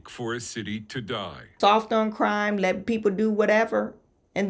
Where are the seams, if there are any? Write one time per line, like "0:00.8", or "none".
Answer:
0:01.5